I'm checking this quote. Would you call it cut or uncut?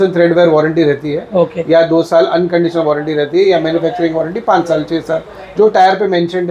uncut